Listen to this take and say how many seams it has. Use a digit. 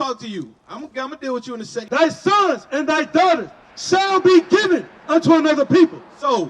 1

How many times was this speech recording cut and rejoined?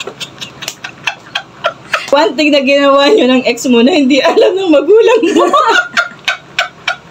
1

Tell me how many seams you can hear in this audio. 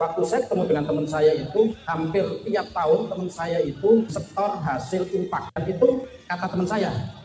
1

